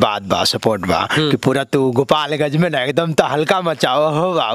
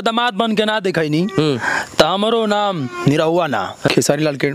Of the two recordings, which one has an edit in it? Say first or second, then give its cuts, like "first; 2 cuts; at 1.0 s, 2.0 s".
second; 1 cut; at 3.2 s